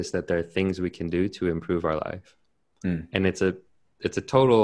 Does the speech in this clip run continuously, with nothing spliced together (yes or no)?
yes